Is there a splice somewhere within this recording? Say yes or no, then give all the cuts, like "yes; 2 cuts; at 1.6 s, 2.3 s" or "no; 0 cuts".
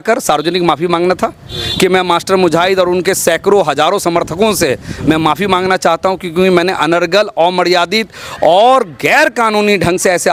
no; 0 cuts